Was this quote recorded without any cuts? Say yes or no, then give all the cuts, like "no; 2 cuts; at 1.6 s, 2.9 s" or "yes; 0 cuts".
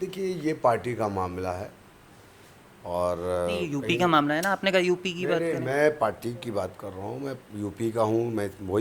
yes; 0 cuts